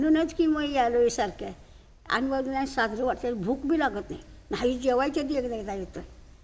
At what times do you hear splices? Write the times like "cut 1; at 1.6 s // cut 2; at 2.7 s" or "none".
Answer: none